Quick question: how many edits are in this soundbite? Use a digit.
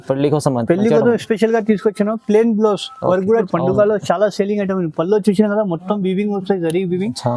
1